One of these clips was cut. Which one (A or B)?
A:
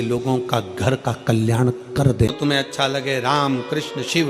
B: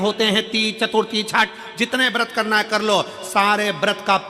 A